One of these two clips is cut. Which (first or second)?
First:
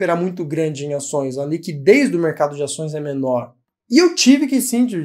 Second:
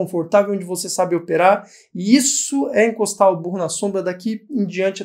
first